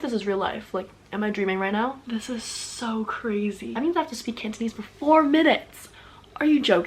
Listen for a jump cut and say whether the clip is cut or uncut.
cut